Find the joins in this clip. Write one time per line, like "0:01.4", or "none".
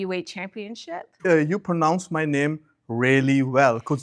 0:01.2

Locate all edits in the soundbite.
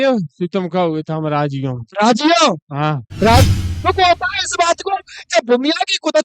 0:03.5

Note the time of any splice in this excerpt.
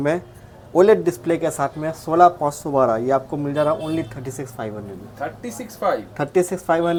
none

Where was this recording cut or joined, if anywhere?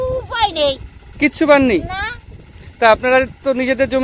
none

